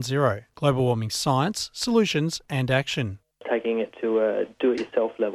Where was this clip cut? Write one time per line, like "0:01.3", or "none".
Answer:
none